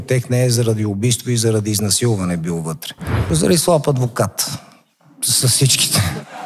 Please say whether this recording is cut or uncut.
cut